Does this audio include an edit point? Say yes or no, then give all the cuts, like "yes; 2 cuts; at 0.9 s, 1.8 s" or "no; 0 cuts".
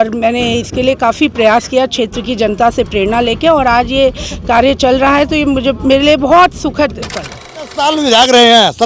yes; 1 cut; at 7.7 s